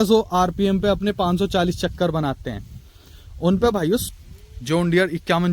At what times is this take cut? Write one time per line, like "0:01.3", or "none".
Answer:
0:04.1